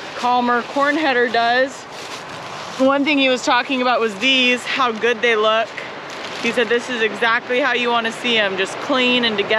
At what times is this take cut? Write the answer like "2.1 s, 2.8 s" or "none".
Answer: none